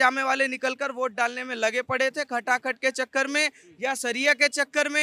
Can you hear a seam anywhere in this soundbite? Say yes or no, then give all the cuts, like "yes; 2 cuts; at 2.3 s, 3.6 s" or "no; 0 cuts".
no; 0 cuts